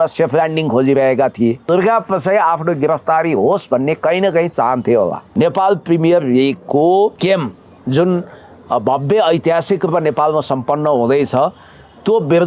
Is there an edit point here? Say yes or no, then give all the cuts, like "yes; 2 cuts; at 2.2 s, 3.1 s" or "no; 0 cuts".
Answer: yes; 3 cuts; at 1.6 s, 5.2 s, 7.2 s